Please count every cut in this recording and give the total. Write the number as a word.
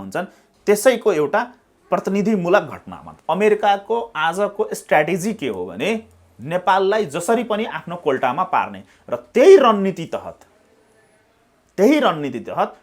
one